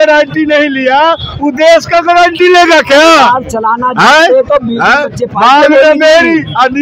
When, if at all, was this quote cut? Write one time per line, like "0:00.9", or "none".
none